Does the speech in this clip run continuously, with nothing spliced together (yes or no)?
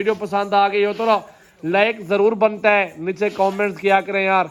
yes